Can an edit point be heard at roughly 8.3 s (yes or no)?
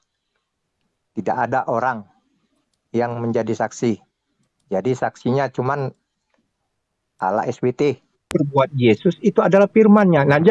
yes